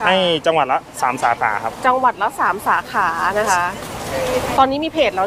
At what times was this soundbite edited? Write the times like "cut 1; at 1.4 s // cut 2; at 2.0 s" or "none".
none